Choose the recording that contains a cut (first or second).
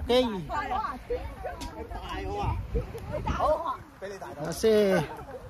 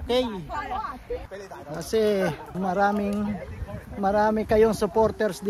second